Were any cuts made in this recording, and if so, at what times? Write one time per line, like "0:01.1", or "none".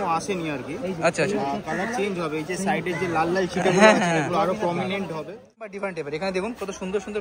0:05.6